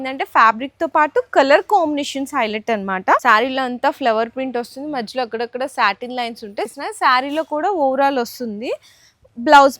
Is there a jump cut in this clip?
yes; 2 cuts; at 3.2 s, 6.7 s

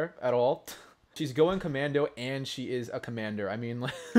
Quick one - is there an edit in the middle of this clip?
yes; 1 cut; at 1.2 s

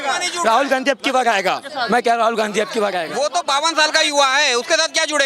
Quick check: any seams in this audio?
yes; 1 cut; at 3.1 s

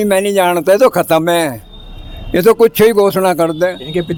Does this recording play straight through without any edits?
yes; 0 cuts

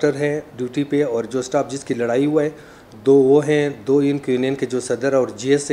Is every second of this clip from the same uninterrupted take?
yes; 0 cuts

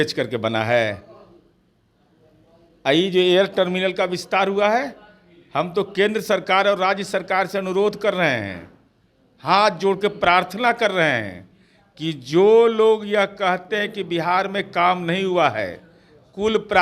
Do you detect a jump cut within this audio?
no; 0 cuts

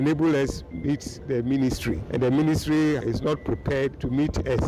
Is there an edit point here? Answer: yes; 2 cuts; at 2.0 s, 3.5 s

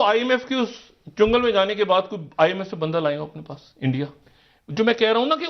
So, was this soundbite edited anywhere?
yes; 1 cut; at 4.2 s

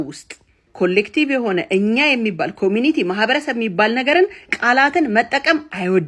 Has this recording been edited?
no; 0 cuts

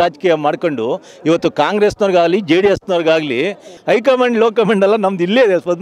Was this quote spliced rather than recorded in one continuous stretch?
yes; 1 cut; at 3.7 s

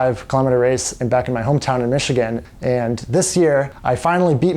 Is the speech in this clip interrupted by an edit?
yes; 2 cuts; at 2.5 s, 3.7 s

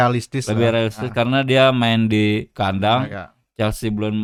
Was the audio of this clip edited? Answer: no; 0 cuts

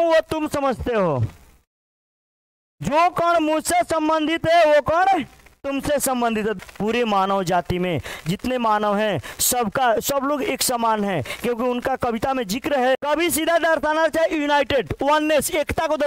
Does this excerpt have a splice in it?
yes; 2 cuts; at 6.6 s, 13.0 s

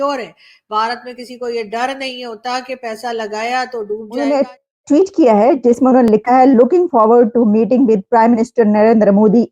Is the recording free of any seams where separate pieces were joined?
no; 1 cut; at 4.1 s

